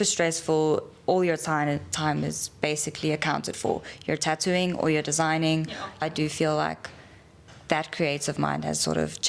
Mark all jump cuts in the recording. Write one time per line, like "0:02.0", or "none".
0:06.0